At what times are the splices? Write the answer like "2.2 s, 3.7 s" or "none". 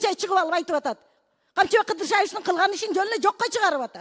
none